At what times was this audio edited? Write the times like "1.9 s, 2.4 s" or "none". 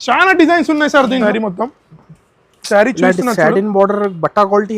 1.2 s